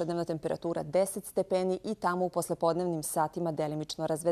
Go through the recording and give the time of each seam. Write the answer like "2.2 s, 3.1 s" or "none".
1.9 s